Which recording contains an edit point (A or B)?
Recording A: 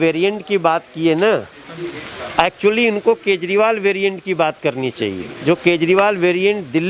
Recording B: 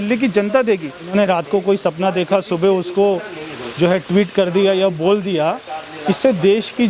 B